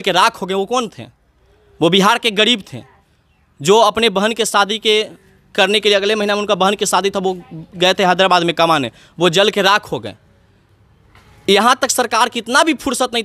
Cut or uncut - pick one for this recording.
uncut